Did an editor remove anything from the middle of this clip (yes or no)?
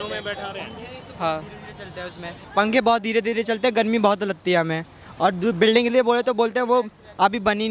no